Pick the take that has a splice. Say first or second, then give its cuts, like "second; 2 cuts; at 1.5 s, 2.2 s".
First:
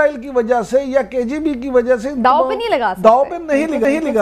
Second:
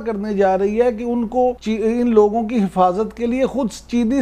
second; 1 cut; at 1.6 s